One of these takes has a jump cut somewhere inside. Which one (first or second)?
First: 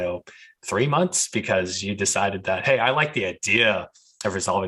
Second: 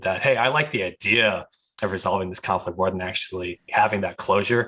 second